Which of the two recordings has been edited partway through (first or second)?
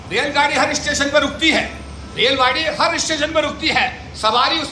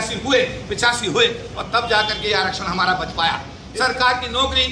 second